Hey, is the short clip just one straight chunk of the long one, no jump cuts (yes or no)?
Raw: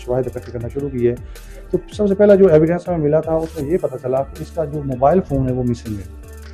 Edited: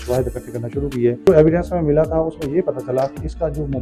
no